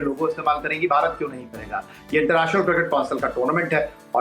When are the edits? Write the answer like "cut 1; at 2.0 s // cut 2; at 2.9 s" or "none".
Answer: none